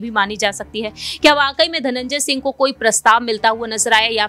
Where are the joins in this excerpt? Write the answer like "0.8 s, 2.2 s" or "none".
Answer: none

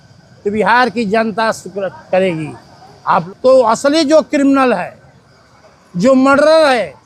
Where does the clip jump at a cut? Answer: 3.3 s

